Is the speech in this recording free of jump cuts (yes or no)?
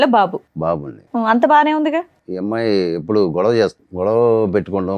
no